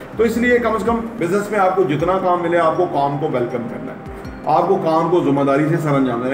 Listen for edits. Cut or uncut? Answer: cut